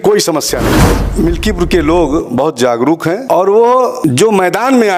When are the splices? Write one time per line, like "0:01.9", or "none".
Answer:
0:01.0
0:03.2
0:04.0